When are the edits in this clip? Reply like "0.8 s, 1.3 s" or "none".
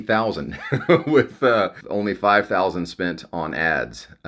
1.8 s